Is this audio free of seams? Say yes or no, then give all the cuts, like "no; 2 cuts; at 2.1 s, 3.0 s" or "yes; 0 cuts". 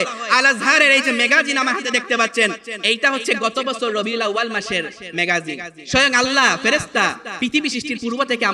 no; 2 cuts; at 2.7 s, 5.8 s